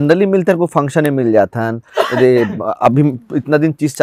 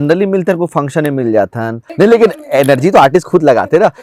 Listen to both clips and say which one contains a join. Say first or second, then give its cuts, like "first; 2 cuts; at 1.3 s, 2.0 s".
second; 1 cut; at 1.8 s